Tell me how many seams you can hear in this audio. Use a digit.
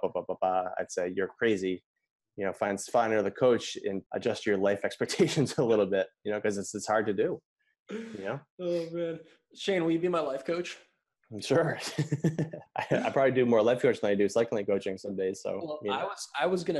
2